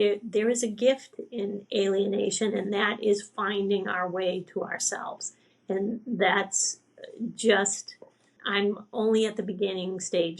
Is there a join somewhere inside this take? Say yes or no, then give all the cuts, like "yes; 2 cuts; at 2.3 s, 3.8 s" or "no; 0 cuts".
yes; 1 cut; at 8.4 s